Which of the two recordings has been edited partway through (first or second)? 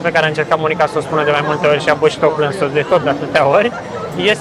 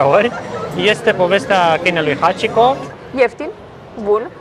second